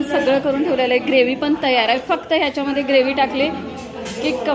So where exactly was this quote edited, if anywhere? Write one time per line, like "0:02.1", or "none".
none